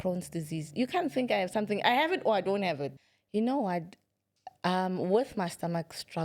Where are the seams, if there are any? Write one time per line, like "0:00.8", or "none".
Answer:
0:02.9

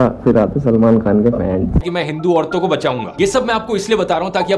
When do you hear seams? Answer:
0:01.9

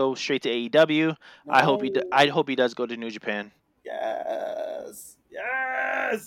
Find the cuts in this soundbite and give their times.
none

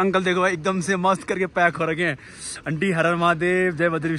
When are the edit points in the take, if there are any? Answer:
none

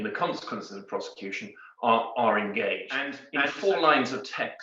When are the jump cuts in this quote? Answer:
0:03.2

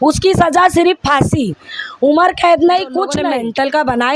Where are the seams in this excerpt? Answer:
0:03.2

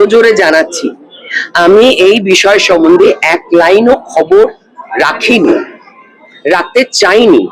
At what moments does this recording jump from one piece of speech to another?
none

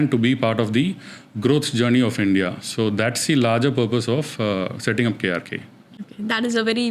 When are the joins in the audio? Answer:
none

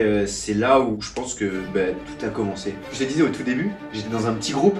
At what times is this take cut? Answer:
0:00.9
0:02.9

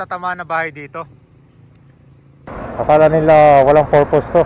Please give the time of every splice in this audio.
0:02.5

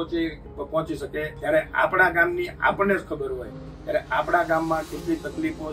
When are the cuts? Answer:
0:01.3

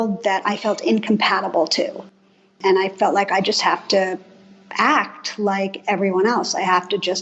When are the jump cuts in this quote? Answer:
0:02.6

